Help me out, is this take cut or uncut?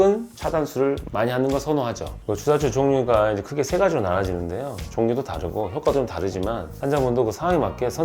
cut